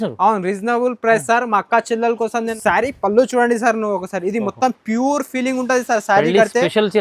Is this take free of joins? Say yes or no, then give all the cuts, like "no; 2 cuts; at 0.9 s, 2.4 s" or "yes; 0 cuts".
no; 1 cut; at 2.5 s